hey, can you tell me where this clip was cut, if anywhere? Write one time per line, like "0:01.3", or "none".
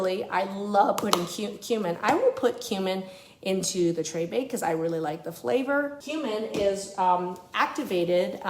0:06.0